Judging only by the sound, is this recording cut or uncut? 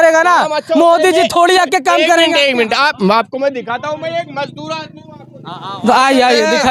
uncut